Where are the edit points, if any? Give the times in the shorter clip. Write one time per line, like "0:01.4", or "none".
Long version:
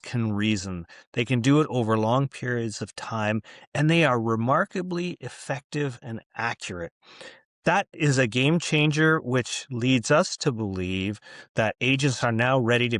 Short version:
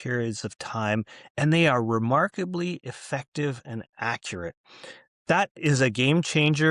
none